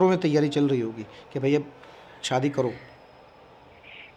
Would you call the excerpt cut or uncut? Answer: uncut